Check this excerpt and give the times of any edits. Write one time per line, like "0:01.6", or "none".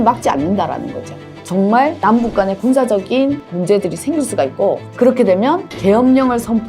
0:01.3